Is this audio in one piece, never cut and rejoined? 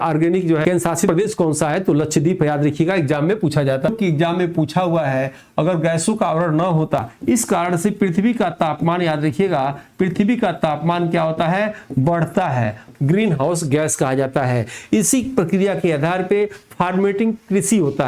no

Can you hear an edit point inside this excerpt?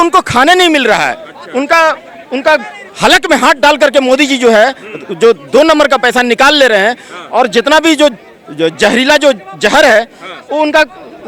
no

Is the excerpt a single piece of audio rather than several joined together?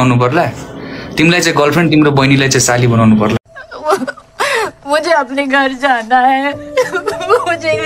no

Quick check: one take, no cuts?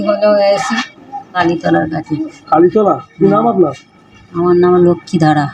no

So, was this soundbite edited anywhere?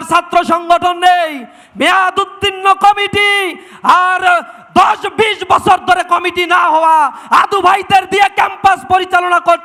no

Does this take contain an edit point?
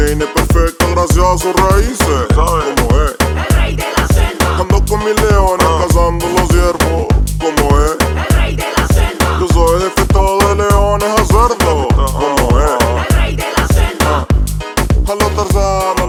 no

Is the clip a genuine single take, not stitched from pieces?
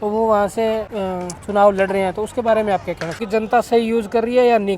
no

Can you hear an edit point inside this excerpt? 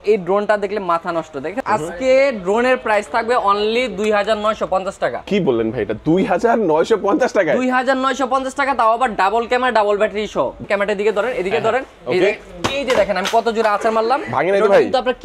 yes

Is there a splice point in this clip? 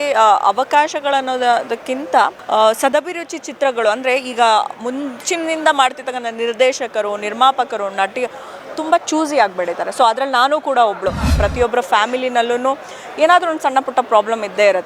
yes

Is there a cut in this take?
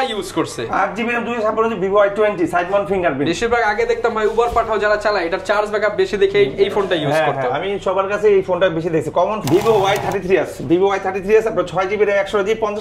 yes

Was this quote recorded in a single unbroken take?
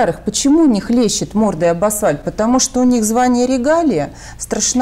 yes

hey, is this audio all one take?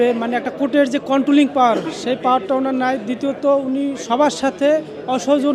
yes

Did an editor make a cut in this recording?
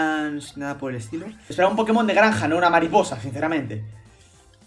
yes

